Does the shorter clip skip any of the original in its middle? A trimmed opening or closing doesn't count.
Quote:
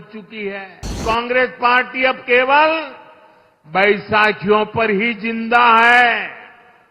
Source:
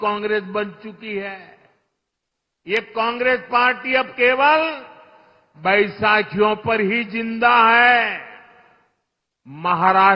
yes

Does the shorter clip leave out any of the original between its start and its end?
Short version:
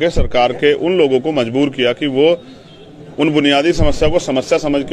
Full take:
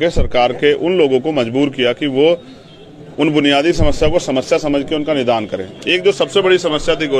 no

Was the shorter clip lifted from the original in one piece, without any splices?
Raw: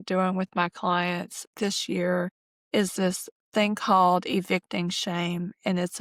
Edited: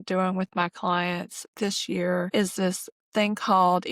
no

